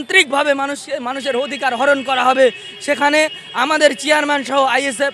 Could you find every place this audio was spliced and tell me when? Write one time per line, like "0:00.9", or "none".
none